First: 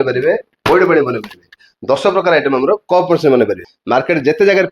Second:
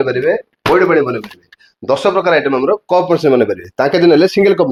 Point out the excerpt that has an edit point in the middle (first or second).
first